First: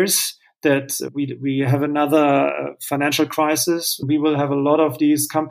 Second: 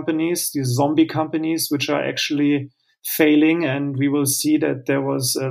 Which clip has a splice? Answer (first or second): first